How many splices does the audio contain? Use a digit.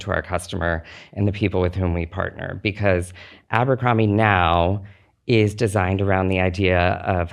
0